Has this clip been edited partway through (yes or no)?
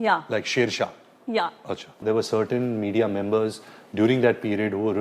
yes